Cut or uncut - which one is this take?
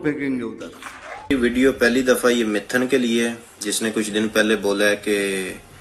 cut